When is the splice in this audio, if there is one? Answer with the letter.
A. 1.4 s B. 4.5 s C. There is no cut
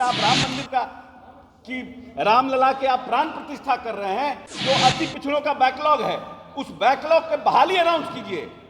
B